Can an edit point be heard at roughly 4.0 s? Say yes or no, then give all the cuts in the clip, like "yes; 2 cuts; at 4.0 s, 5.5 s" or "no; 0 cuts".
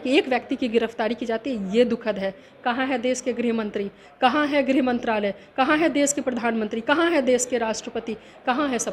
no; 0 cuts